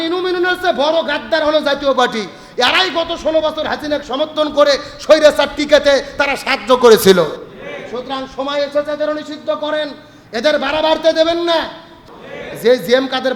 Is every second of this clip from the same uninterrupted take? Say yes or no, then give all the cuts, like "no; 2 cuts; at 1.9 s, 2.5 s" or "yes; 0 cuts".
no; 1 cut; at 12.1 s